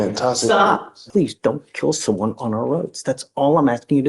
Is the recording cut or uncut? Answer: cut